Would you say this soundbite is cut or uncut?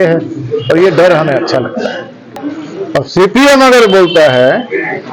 cut